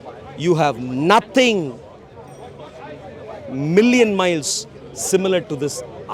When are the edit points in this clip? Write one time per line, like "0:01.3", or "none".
none